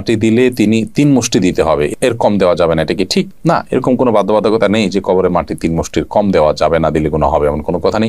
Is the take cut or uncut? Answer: uncut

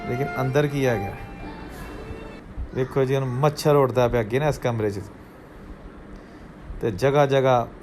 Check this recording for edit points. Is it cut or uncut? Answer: cut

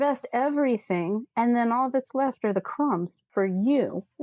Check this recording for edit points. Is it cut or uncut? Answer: cut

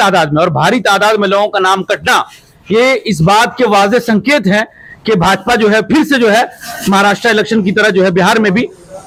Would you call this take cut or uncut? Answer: uncut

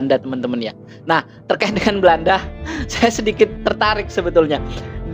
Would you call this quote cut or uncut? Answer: uncut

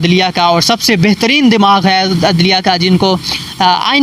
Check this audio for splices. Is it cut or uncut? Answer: uncut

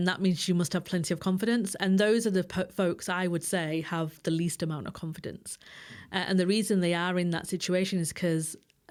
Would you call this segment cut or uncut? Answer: uncut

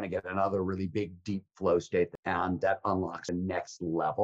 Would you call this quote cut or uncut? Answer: cut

